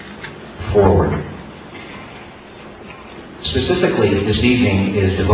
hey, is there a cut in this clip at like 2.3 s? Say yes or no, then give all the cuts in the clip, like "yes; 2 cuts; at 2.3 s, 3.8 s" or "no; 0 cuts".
no; 1 cut; at 3.9 s